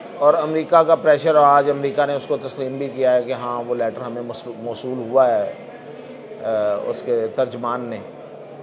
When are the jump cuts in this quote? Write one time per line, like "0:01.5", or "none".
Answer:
none